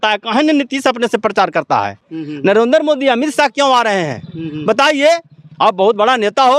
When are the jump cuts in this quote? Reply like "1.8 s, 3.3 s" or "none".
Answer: none